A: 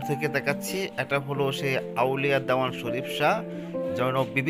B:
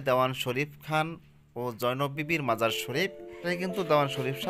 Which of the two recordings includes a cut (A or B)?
B